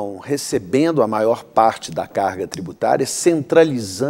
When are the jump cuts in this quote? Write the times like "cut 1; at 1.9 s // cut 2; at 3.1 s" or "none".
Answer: none